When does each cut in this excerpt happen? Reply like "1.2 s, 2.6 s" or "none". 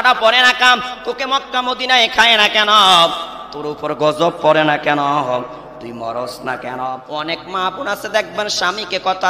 7.0 s